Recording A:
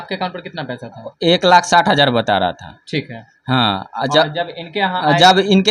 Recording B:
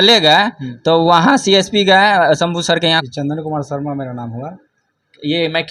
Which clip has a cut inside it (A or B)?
B